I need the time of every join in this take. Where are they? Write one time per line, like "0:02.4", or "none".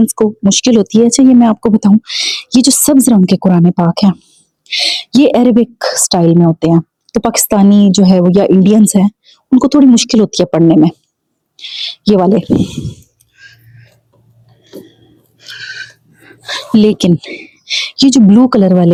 none